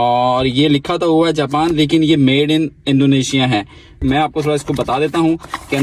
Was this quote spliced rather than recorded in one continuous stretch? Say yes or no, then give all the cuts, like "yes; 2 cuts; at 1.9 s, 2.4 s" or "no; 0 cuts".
yes; 1 cut; at 4.0 s